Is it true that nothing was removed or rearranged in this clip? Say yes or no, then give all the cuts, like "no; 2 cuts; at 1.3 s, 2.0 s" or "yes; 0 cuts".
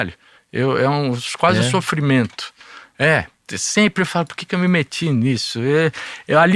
yes; 0 cuts